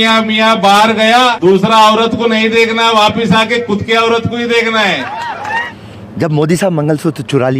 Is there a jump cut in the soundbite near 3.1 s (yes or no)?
no